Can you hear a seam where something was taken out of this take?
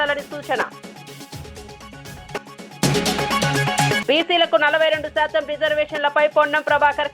yes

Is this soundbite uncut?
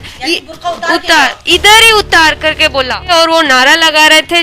no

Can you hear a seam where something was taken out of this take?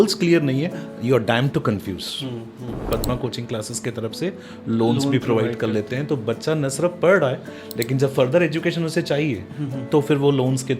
yes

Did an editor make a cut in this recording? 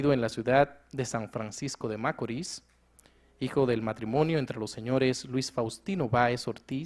no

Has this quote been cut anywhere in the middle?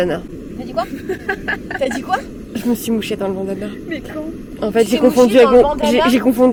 no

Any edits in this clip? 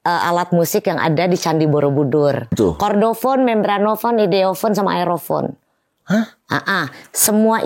yes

